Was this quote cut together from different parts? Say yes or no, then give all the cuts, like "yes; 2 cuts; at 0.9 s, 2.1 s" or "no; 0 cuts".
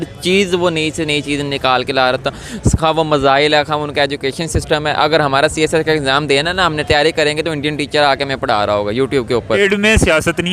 yes; 1 cut; at 9.5 s